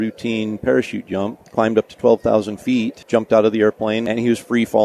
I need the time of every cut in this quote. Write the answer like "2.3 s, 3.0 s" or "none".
1.4 s, 3.0 s, 4.0 s